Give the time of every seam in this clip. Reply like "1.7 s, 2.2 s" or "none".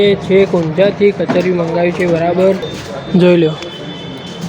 2.8 s